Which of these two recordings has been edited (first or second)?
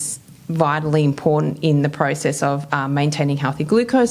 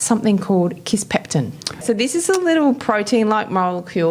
second